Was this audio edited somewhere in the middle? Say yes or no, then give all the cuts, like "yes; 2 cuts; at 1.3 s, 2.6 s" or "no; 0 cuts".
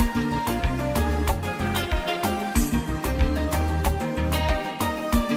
no; 0 cuts